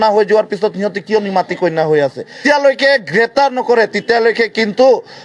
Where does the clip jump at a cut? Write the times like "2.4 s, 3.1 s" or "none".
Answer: 2.4 s